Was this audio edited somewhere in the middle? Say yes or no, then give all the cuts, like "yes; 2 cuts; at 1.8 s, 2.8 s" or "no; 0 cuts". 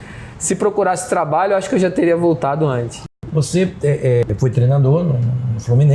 yes; 2 cuts; at 3.0 s, 4.2 s